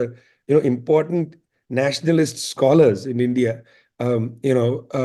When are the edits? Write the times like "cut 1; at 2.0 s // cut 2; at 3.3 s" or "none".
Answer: none